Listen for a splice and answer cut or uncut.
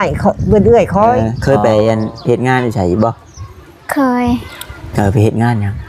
cut